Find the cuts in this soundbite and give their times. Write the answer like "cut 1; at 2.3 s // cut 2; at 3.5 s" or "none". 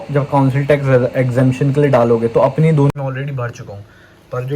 cut 1; at 2.9 s